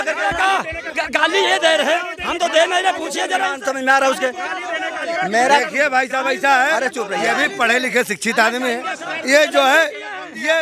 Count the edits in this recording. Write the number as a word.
zero